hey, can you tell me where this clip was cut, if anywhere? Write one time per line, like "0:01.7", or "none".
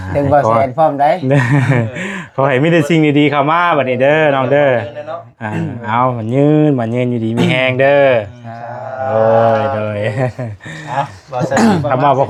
none